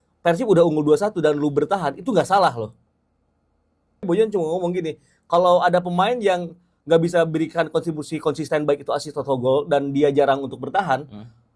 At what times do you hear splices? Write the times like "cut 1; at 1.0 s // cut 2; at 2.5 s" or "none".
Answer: cut 1; at 4.0 s